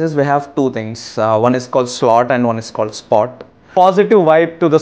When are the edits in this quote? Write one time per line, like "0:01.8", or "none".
0:03.7